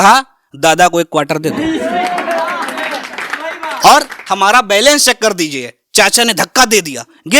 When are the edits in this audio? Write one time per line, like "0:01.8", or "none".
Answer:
0:04.2